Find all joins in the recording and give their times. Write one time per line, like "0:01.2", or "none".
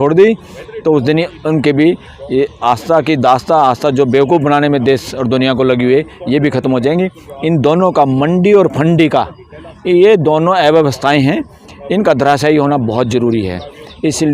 none

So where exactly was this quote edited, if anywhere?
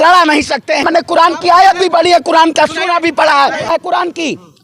0:00.8
0:03.7

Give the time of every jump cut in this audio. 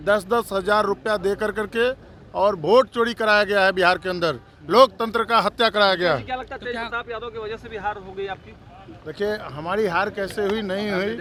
none

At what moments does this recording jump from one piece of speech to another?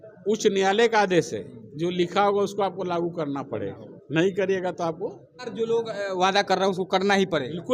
0:05.4

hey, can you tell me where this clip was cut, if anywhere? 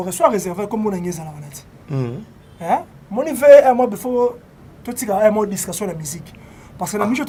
none

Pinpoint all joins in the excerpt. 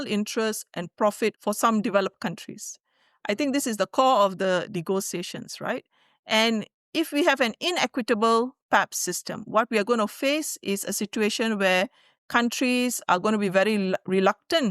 0:01.4

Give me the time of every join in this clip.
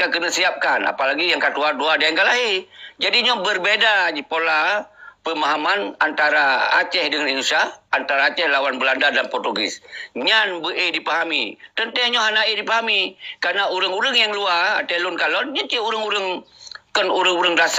none

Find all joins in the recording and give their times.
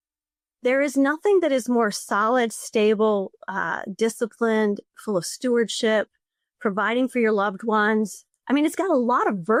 none

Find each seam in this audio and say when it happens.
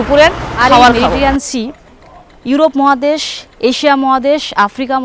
0:01.1

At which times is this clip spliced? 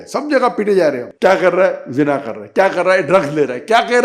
0:01.1

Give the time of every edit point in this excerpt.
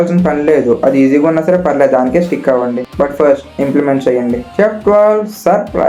none

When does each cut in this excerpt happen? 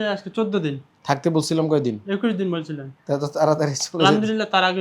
none

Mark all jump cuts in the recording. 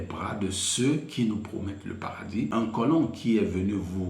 0:02.5

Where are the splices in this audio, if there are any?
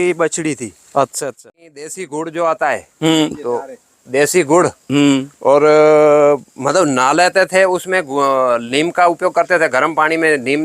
0:01.2

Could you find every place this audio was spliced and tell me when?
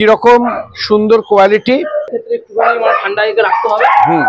0:02.2

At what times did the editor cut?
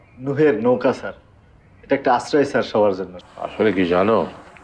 0:03.1

